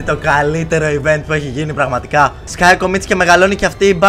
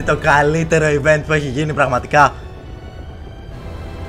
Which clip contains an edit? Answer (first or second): first